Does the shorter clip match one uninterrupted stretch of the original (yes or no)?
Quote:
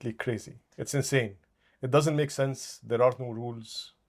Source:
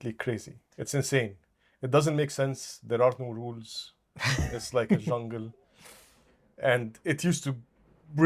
yes